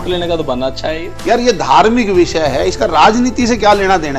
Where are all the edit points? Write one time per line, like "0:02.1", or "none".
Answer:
0:01.1